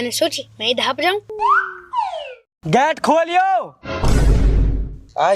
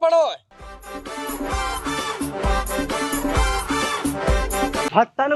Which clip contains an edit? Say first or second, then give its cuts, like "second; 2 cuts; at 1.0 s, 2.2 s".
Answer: first; 1 cut; at 2.5 s